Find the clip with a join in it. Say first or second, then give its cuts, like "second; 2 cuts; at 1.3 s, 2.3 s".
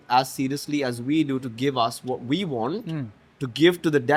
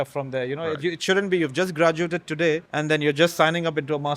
second; 1 cut; at 2.7 s